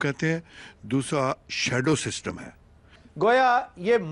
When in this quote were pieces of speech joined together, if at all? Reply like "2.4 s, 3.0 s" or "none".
3.0 s